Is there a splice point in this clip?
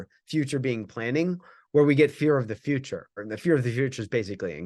yes; 1 cut; at 3.3 s

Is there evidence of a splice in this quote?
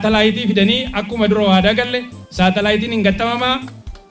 no; 0 cuts

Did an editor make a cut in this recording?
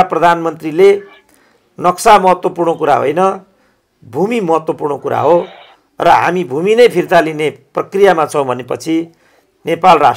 no; 0 cuts

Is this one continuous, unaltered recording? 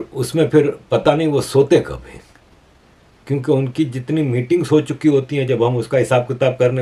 yes; 0 cuts

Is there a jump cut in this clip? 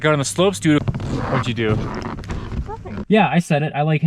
yes; 1 cut; at 3.0 s

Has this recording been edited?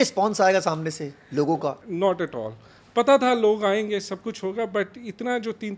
yes; 1 cut; at 1.8 s

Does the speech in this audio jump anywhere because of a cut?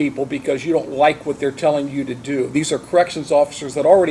no; 0 cuts

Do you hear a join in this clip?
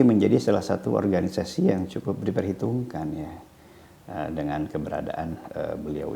no; 0 cuts

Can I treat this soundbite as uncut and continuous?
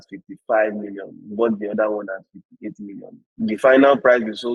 yes; 0 cuts

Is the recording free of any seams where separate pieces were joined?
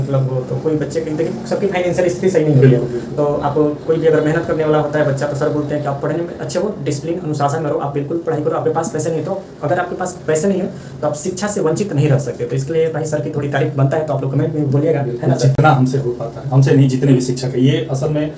yes; 0 cuts

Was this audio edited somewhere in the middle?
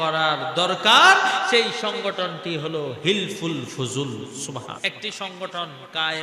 yes; 1 cut; at 4.8 s

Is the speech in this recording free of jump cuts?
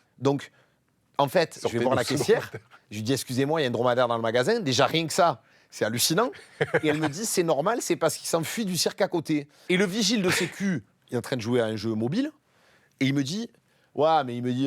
no; 1 cut; at 9.6 s

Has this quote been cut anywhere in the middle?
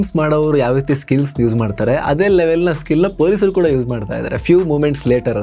no; 0 cuts

